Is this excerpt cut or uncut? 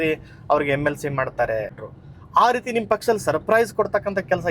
cut